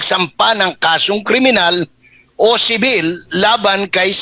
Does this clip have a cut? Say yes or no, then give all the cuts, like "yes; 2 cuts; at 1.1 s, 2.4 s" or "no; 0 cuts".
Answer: no; 0 cuts